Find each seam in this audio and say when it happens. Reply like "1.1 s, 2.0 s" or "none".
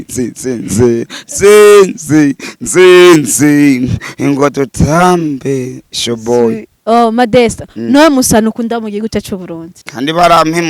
6.7 s, 9.8 s